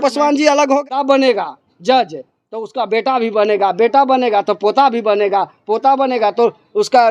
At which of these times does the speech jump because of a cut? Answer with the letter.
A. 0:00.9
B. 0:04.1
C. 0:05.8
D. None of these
A